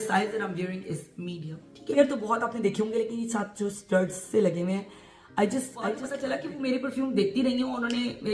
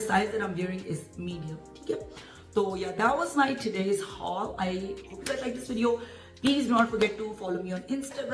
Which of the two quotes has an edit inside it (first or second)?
first